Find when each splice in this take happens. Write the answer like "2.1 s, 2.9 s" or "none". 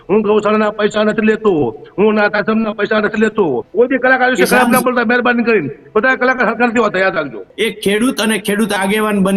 3.7 s, 7.4 s